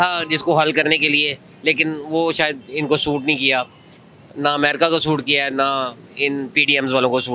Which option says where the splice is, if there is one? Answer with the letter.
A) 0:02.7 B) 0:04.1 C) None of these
C